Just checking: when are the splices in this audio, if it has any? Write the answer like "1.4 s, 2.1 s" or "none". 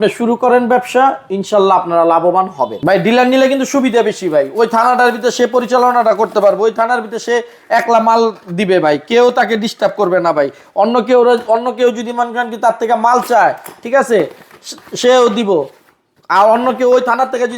2.8 s

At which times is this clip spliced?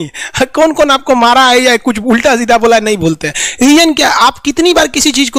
none

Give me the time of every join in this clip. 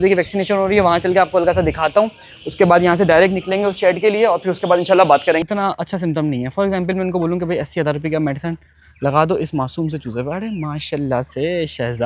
5.4 s

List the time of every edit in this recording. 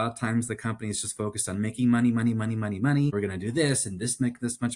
3.1 s

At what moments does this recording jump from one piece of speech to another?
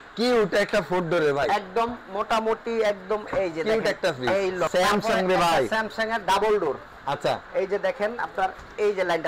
4.7 s

